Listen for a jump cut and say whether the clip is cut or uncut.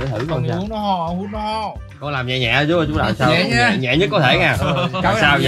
cut